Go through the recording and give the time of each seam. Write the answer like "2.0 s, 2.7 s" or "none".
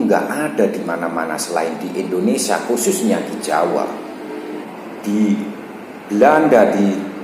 4.7 s